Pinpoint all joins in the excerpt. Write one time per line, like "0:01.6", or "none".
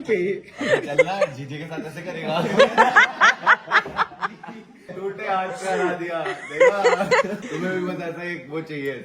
0:04.8
0:07.4